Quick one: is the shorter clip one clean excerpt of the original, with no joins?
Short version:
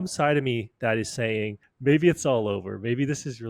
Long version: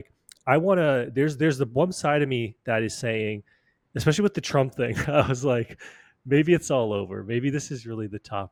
no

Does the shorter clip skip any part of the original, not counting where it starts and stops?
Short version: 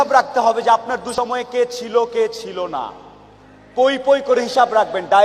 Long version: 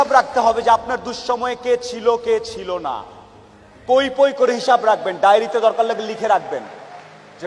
yes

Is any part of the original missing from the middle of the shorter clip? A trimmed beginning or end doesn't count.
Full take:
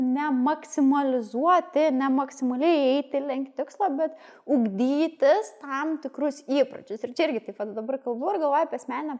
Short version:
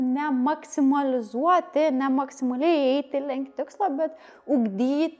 no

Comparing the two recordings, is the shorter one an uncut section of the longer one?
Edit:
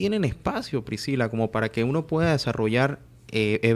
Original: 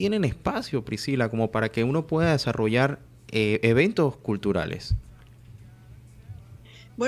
yes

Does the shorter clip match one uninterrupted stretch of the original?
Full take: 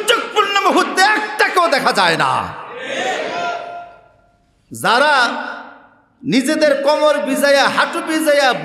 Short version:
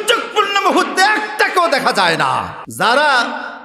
no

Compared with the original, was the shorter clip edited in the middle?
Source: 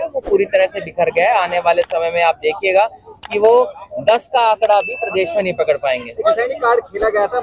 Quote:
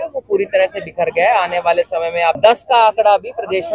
yes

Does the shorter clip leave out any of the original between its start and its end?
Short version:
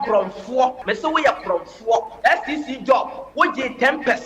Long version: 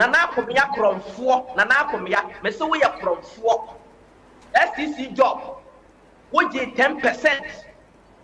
yes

